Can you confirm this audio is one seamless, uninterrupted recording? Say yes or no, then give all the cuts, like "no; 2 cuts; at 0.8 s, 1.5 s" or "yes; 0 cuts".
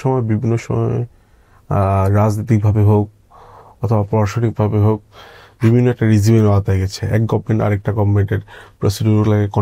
yes; 0 cuts